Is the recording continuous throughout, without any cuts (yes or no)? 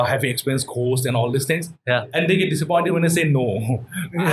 yes